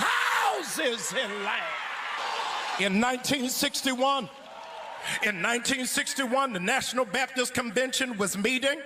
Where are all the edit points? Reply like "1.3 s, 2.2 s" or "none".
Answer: none